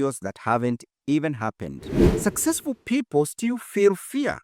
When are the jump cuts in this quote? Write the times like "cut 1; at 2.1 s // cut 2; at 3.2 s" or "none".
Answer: cut 1; at 2.0 s